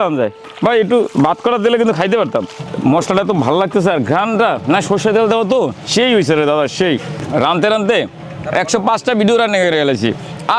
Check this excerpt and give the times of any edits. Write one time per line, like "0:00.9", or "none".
0:02.6
0:05.8
0:07.1